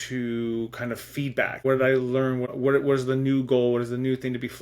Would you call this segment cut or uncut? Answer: cut